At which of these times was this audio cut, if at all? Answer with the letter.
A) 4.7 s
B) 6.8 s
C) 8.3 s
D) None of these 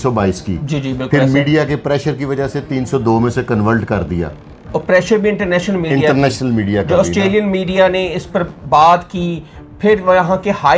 D